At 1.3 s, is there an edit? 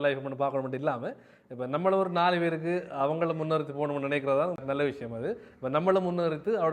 no; 1 cut; at 4.6 s

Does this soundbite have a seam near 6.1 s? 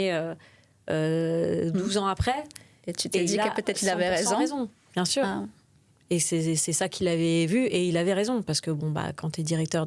no; 0 cuts

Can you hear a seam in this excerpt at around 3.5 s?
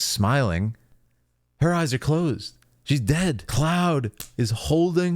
yes; 1 cut; at 3.5 s

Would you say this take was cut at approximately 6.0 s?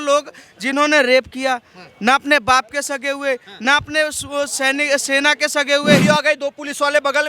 yes; 1 cut; at 6.0 s

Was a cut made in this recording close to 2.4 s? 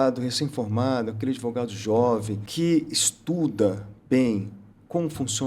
yes; 1 cut; at 2.4 s

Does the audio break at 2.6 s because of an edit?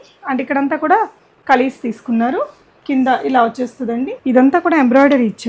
no; 2 cuts; at 1.3 s, 4.1 s

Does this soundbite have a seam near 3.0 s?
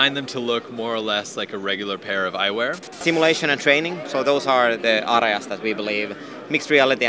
yes; 1 cut; at 3.0 s

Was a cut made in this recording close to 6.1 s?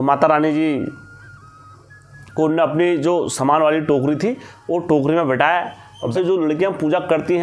yes; 1 cut; at 6.1 s

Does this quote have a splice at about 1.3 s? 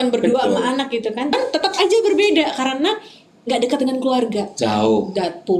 yes; 1 cut; at 1.3 s

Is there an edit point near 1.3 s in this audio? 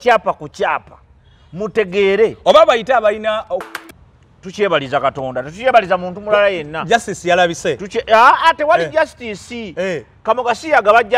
no; 1 cut; at 3.7 s

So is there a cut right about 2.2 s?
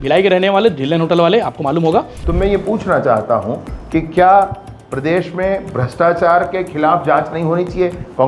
yes; 1 cut; at 2.2 s

